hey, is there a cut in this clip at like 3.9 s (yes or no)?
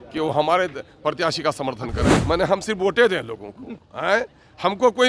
no